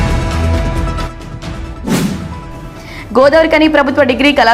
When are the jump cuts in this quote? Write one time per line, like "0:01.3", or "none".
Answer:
0:00.9